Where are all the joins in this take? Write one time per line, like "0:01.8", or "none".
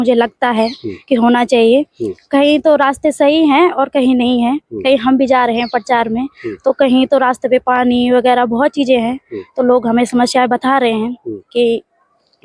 none